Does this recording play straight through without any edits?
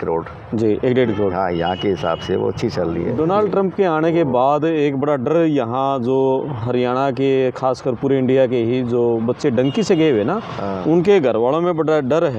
no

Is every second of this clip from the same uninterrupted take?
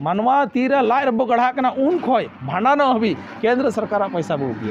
yes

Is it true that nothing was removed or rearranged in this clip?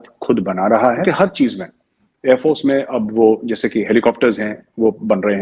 no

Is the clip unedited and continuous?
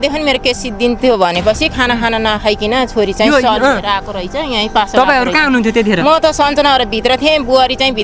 yes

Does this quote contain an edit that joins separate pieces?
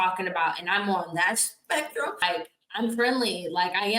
yes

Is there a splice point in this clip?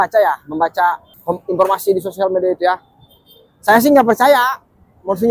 yes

